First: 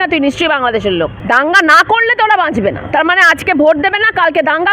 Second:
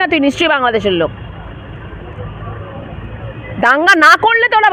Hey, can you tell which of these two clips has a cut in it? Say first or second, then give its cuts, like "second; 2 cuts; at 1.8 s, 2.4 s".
first; 1 cut; at 1.2 s